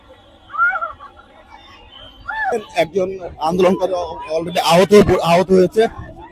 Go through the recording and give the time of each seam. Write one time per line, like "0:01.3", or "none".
0:02.5